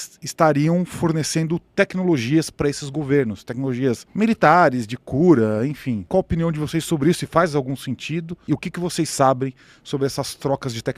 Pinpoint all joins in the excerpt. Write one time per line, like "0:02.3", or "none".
0:04.1
0:06.1